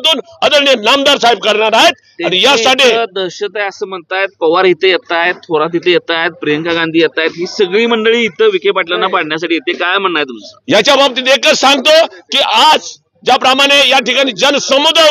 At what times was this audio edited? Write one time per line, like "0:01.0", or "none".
none